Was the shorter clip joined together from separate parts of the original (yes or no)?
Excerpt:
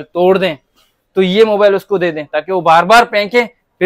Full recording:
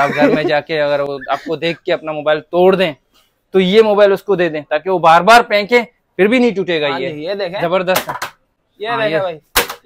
no